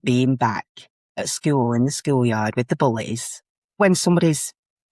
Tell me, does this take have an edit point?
yes; 1 cut; at 3.8 s

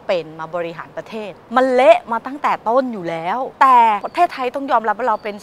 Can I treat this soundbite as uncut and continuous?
no; 3 cuts; at 1.4 s, 3.5 s, 4.1 s

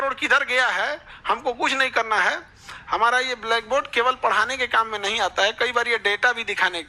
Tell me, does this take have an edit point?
no; 0 cuts

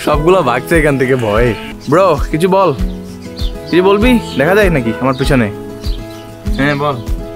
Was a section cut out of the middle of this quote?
yes; 1 cut; at 1.7 s

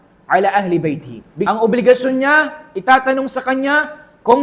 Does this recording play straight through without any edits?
no; 1 cut; at 1.5 s

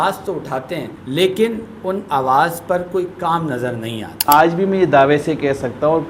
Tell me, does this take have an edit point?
yes; 2 cuts; at 0.9 s, 4.3 s

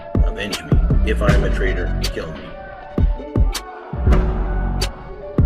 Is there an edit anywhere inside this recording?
yes; 1 cut; at 2.6 s

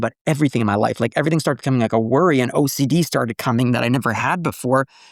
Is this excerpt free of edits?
yes; 0 cuts

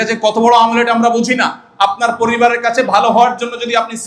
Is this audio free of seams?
yes; 0 cuts

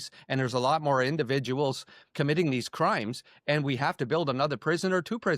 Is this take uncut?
no; 1 cut; at 2.1 s

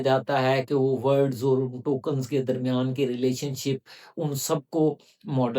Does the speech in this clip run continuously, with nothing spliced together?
yes; 0 cuts

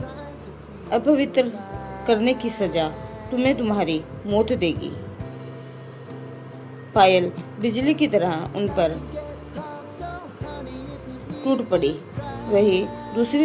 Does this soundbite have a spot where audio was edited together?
no; 0 cuts

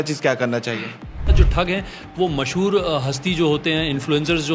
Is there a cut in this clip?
yes; 1 cut; at 1.3 s

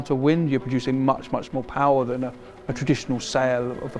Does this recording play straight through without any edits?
yes; 0 cuts

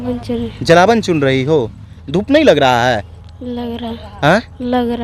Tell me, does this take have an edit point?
yes; 1 cut; at 1.9 s

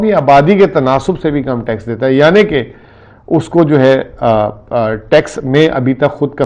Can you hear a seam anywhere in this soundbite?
no; 0 cuts

